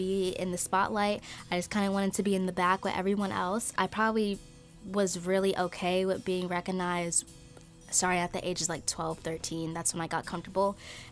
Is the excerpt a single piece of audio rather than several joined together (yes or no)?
yes